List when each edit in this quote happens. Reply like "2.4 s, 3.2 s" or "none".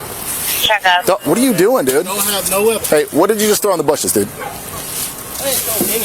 2.8 s